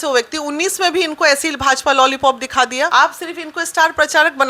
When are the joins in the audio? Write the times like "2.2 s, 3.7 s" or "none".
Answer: 2.9 s